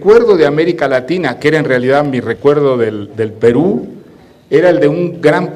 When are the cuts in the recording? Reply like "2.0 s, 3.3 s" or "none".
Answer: 3.6 s